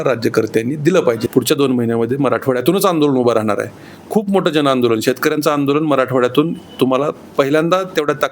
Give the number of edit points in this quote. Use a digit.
1